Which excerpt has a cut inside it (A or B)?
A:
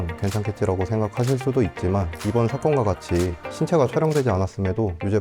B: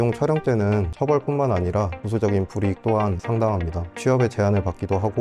B